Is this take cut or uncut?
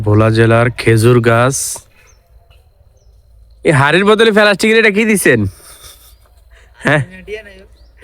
uncut